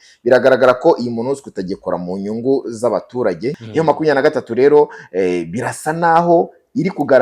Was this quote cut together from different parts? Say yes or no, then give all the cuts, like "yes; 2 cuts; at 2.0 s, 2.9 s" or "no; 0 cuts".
yes; 1 cut; at 3.6 s